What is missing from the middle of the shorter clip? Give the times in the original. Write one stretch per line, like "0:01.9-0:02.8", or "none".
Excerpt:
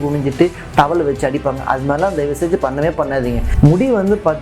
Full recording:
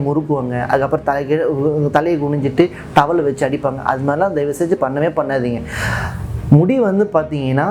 0:05.6-0:06.3